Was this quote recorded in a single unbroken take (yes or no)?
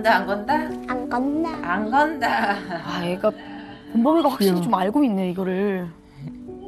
yes